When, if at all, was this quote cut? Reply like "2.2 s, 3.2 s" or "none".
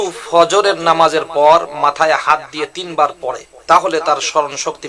3.5 s